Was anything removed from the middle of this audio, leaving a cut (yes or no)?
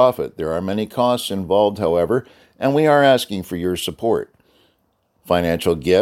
no